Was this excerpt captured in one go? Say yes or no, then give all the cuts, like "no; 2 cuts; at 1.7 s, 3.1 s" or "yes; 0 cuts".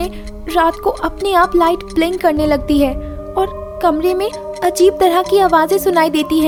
yes; 0 cuts